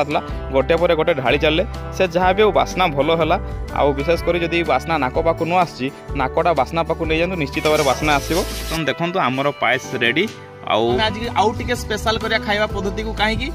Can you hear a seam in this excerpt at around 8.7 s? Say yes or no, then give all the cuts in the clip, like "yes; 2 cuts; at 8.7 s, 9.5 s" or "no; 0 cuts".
yes; 2 cuts; at 8.7 s, 11.0 s